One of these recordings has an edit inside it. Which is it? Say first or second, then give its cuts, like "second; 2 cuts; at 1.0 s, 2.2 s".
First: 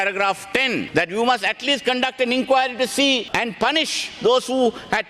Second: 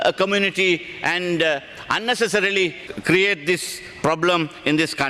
first; 2 cuts; at 0.9 s, 3.3 s